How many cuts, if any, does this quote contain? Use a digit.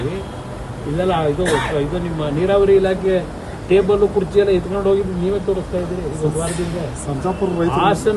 0